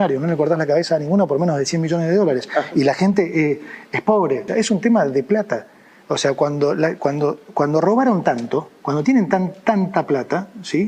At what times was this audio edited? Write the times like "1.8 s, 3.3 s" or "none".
4.5 s